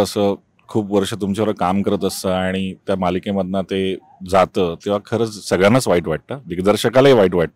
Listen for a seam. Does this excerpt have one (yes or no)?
no